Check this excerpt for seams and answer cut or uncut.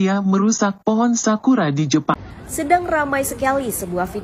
cut